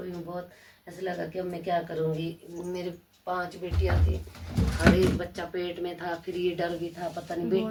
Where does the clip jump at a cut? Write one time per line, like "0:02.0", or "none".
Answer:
none